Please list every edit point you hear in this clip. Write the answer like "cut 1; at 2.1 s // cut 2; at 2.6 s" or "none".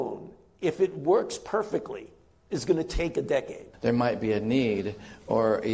cut 1; at 3.9 s